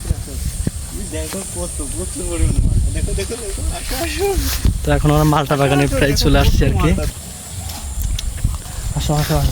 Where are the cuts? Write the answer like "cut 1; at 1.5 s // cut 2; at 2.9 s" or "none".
cut 1; at 7.1 s